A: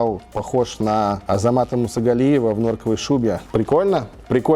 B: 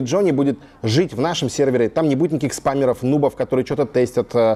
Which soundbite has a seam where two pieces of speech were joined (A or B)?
A